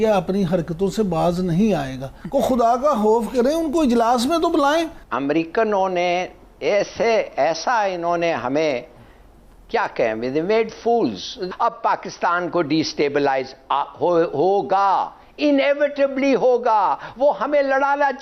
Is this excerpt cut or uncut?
cut